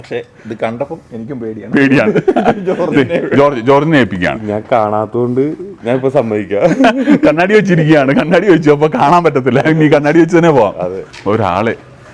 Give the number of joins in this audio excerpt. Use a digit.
1